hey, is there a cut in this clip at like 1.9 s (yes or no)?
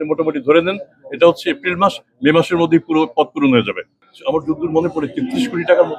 no